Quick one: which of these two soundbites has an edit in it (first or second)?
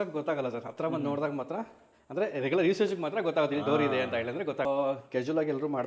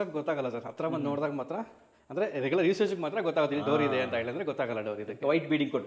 first